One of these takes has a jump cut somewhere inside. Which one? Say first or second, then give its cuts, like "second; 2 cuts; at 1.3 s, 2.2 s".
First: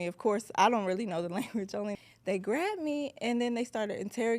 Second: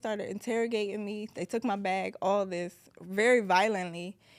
first; 1 cut; at 2.0 s